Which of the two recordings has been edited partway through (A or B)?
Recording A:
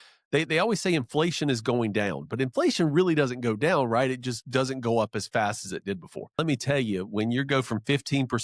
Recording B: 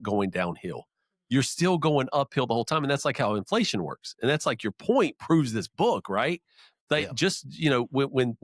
A